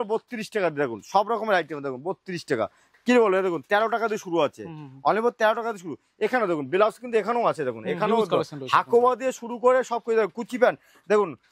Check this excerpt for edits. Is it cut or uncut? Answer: uncut